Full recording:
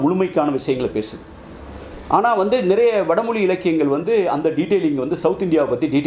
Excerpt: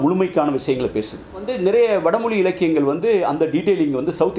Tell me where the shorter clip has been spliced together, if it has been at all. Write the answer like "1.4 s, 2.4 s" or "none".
1.5 s

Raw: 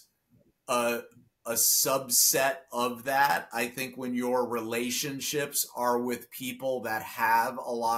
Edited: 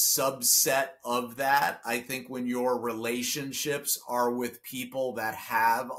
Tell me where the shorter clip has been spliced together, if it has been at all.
none

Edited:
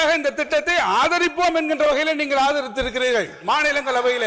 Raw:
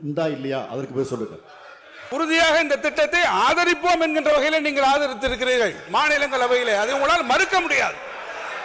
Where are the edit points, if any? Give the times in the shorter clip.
none

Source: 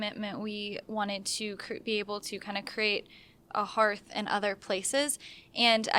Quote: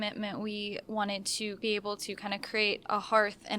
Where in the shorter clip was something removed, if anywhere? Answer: 1.6 s, 2.8 s

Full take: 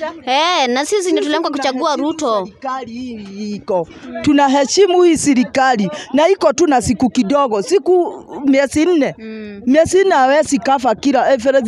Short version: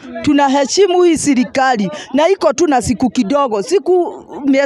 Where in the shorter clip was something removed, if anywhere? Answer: none

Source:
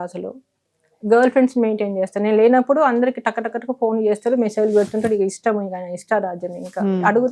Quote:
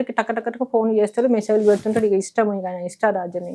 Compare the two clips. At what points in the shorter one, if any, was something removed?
none

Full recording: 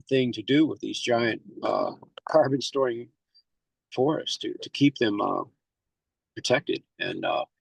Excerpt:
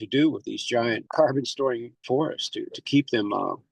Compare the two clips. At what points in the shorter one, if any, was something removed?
1.0 s, 1.9 s

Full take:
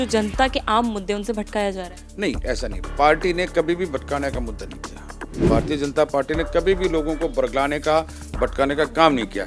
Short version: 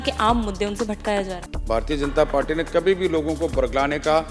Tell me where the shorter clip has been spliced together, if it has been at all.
1.7 s

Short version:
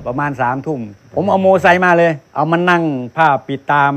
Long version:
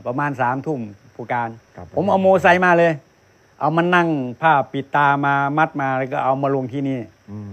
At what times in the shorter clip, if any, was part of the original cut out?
1.0 s, 2.2 s

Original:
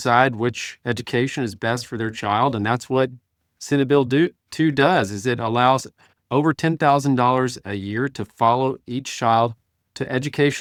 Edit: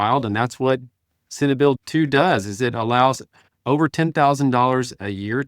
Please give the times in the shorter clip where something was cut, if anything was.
1.8 s

